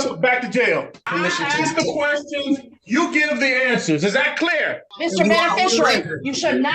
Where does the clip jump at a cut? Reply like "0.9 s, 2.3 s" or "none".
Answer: 1.1 s, 4.9 s